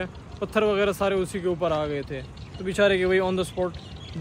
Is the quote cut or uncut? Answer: uncut